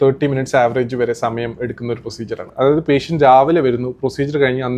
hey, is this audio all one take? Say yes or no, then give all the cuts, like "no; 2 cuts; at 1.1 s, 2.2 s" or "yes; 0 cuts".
no; 1 cut; at 2.4 s